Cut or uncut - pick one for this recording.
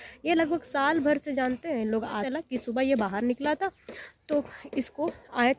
cut